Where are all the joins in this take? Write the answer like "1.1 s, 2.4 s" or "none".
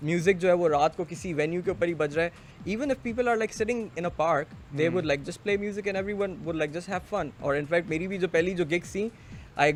none